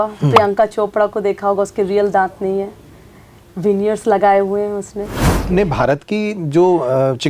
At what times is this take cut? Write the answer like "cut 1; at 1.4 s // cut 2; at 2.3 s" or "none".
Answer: cut 1; at 5.4 s